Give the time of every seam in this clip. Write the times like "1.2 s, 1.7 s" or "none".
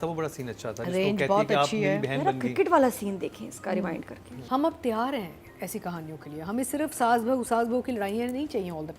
4.3 s